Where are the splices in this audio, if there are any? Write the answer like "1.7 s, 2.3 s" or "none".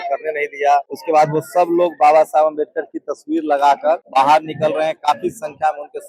0.9 s, 4.1 s